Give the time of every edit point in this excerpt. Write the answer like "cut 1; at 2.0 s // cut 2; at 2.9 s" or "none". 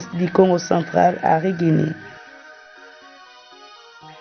cut 1; at 2.0 s